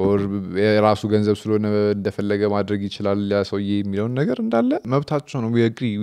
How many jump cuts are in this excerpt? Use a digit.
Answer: 1